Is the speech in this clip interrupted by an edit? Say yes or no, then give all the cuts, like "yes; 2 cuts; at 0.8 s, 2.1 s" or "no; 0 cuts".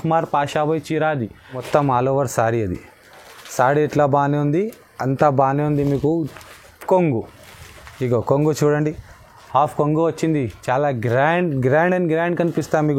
yes; 1 cut; at 1.6 s